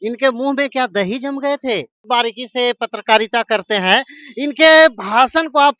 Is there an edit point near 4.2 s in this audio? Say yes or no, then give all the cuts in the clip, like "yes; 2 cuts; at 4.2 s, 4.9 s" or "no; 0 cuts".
no; 1 cut; at 2.1 s